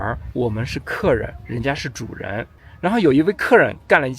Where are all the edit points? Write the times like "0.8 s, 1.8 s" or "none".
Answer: 2.6 s